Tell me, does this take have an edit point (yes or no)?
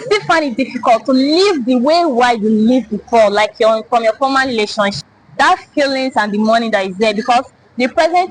no